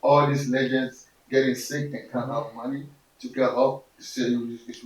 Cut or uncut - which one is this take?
uncut